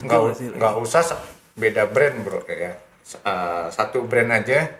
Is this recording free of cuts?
yes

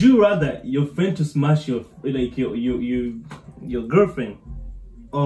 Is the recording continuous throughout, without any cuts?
yes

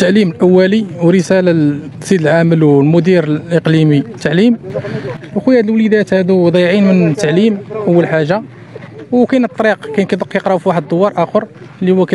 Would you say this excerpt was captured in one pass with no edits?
yes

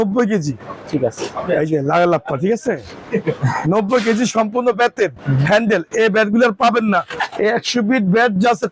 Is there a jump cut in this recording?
no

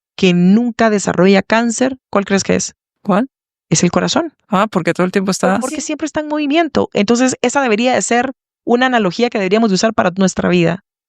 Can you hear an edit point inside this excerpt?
no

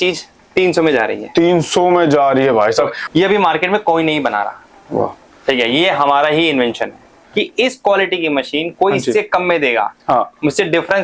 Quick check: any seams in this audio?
yes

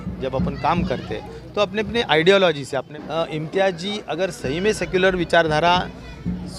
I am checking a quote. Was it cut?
yes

